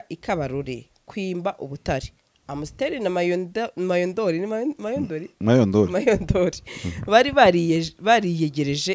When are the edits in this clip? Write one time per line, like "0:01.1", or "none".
none